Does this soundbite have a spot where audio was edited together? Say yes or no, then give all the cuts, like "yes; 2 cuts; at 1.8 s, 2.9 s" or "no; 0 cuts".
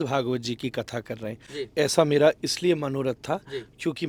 no; 0 cuts